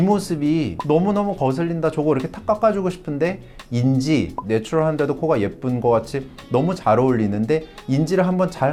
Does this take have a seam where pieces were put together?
no; 0 cuts

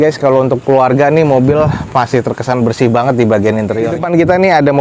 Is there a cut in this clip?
yes; 1 cut; at 3.9 s

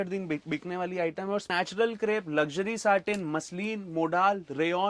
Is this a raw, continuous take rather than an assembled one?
no; 1 cut; at 1.5 s

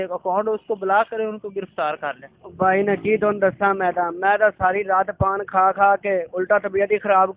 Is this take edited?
yes; 1 cut; at 2.3 s

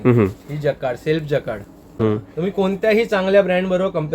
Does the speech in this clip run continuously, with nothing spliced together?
no; 1 cut; at 2.0 s

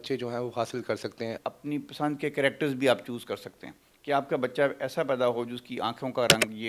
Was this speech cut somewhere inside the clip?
yes; 1 cut; at 1.3 s

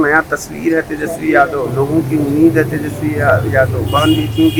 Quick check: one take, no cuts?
yes; 0 cuts

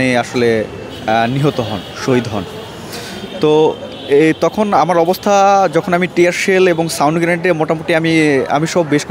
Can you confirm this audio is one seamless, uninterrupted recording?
yes; 0 cuts

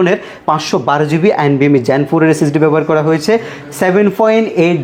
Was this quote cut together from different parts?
no; 0 cuts

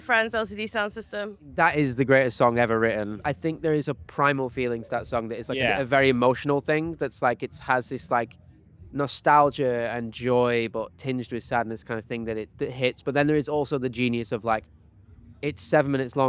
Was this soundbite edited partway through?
yes; 2 cuts; at 1.4 s, 3.3 s

